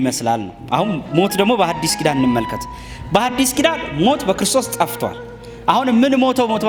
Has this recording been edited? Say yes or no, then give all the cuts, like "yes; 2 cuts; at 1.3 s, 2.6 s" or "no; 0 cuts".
no; 0 cuts